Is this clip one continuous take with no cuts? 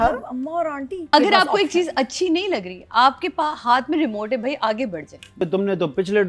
no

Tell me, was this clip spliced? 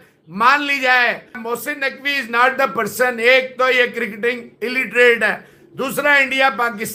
no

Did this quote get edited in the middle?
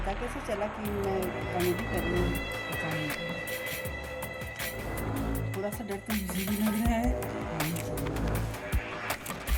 no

